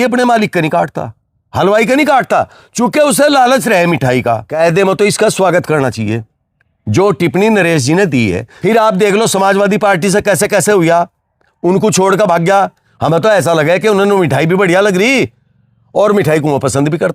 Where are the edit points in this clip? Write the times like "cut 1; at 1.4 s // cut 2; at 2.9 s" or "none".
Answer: cut 1; at 4.5 s // cut 2; at 8.5 s // cut 3; at 12.8 s